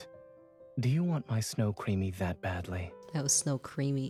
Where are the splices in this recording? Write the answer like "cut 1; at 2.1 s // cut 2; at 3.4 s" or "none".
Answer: none